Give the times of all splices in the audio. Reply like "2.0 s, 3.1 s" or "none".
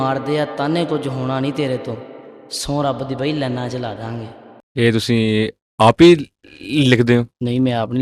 none